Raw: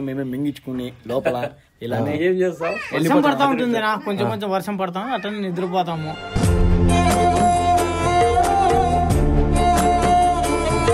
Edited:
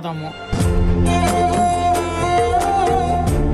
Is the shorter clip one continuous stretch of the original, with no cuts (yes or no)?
yes